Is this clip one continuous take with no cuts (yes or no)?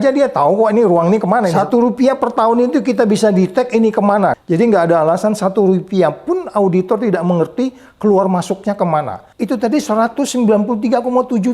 no